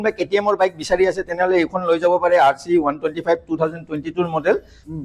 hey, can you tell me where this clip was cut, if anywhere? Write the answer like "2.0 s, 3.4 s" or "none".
none